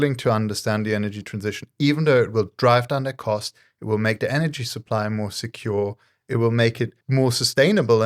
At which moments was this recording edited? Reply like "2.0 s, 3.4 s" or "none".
7.0 s